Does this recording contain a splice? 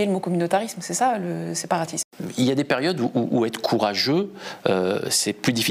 yes; 1 cut; at 2.1 s

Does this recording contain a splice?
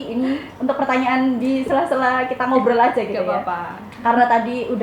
no; 0 cuts

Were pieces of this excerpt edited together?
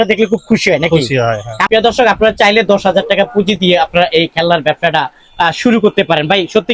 yes; 1 cut; at 1.6 s

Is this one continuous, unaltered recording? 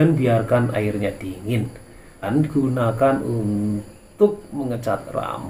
no; 1 cut; at 2.3 s

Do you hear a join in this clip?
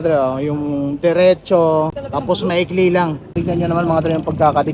yes; 2 cuts; at 2.0 s, 3.3 s

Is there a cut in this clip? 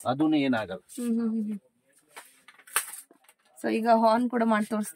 no; 0 cuts

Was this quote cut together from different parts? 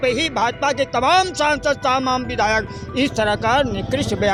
no; 0 cuts

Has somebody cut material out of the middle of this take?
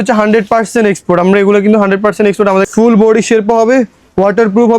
yes; 1 cut; at 2.7 s

